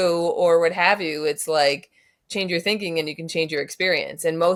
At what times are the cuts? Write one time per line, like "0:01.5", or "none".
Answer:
none

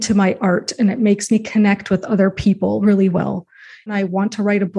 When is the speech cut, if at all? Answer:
0:03.9

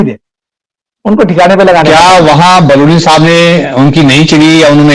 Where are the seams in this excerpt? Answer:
0:01.9

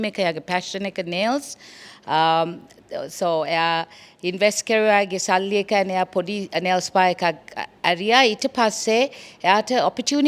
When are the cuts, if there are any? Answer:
none

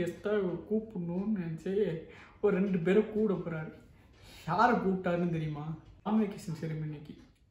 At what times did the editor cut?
0:06.1

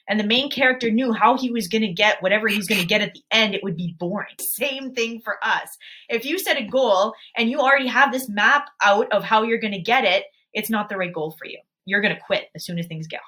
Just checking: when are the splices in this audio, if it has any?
0:04.5
0:11.8

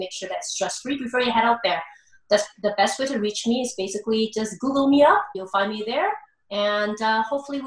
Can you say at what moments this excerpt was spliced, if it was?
0:05.3

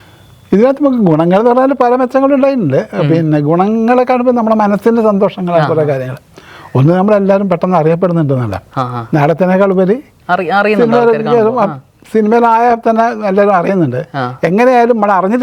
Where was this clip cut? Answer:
none

